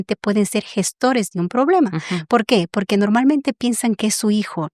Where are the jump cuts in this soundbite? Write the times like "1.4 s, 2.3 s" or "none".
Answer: none